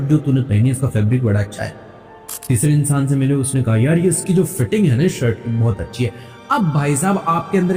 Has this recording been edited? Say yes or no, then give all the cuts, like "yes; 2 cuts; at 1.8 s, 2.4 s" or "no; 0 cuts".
no; 0 cuts